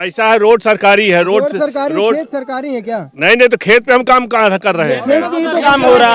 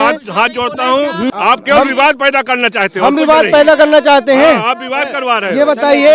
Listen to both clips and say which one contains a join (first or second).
second